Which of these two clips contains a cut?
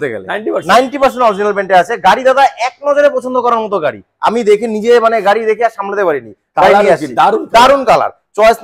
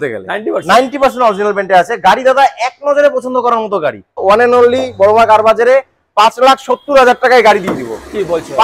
second; 1 cut; at 4.2 s

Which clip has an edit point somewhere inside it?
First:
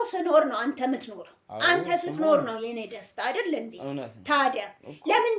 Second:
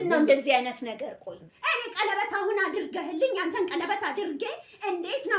second; 1 cut; at 1.3 s

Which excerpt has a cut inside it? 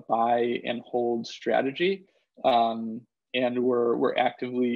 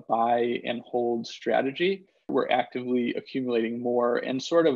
second; 1 cut; at 2.3 s

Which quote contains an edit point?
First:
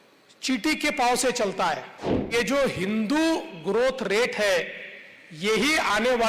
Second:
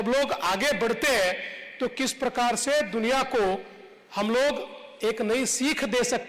first; 1 cut; at 2.3 s

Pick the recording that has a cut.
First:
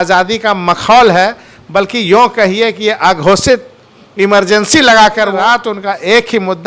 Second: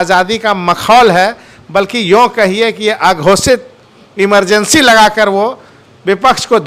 first; 1 cut; at 5.3 s

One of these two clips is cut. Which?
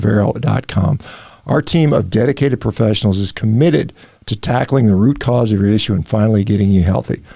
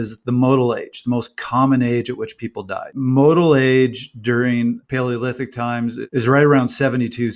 second; 3 cuts; at 3.0 s, 4.8 s, 6.0 s

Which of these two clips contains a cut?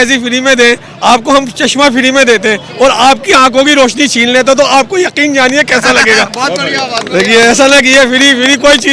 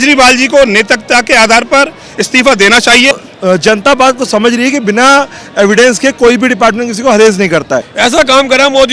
second; 2 cuts; at 3.1 s, 7.9 s

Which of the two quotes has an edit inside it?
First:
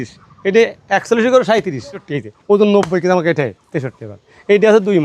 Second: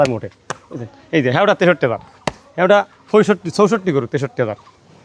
first; 1 cut; at 2.1 s

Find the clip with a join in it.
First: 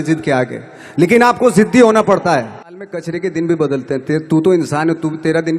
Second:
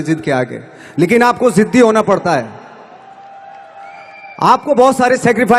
first; 1 cut; at 3.0 s

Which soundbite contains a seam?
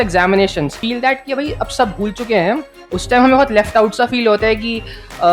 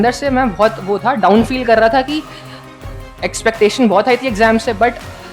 first; 2 cuts; at 0.8 s, 2.7 s

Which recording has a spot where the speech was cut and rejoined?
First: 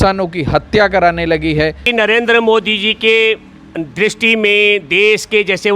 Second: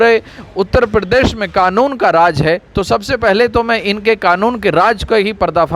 first; 1 cut; at 1.8 s

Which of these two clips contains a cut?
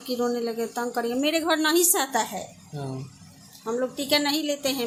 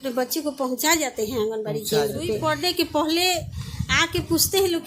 second; 1 cut; at 2.4 s

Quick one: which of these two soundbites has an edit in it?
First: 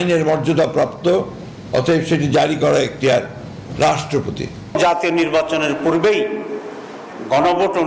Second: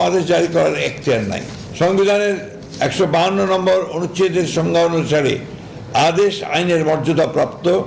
first; 1 cut; at 4.7 s

